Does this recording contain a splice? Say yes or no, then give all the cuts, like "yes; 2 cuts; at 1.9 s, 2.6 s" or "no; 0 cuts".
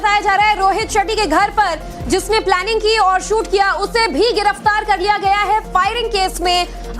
yes; 1 cut; at 4.8 s